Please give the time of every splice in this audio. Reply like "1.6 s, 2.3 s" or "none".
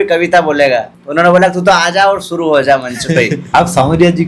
1.0 s, 3.4 s